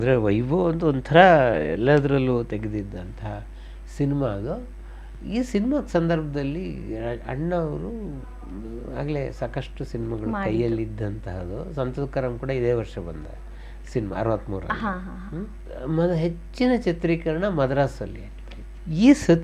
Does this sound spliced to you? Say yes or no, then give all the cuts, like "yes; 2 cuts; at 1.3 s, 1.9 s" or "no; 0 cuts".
no; 0 cuts